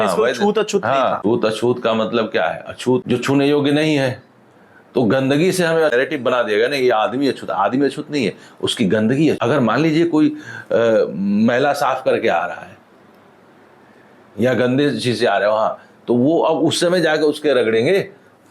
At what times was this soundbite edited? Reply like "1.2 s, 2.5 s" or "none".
none

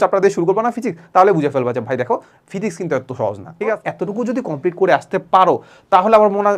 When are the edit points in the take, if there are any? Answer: 3.9 s

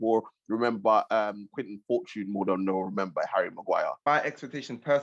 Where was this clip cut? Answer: 4.1 s

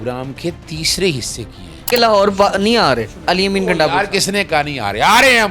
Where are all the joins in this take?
1.9 s

